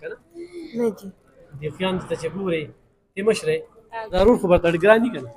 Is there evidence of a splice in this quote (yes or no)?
yes